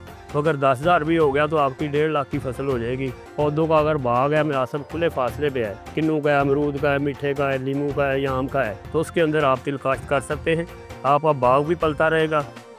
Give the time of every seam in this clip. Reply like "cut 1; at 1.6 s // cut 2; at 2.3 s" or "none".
cut 1; at 3.2 s // cut 2; at 8.8 s

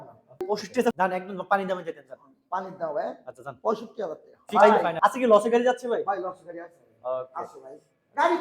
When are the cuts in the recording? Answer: cut 1; at 1.0 s // cut 2; at 4.4 s

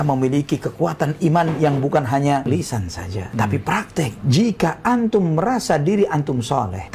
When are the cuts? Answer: cut 1; at 2.4 s // cut 2; at 4.2 s

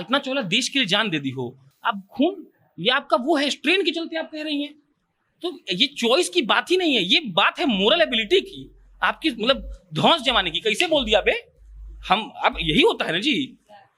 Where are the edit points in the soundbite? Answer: none

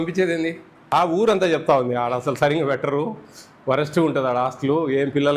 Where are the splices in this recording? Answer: cut 1; at 0.9 s

